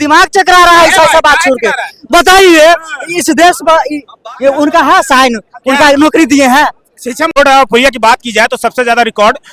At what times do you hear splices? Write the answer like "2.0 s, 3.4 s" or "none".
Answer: 7.3 s